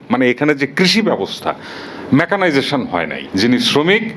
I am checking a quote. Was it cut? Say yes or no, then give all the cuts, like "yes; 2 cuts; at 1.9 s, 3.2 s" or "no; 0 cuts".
yes; 1 cut; at 3.2 s